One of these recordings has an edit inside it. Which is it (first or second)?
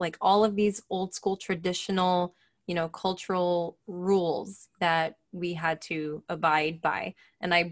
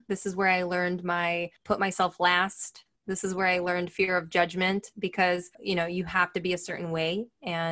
second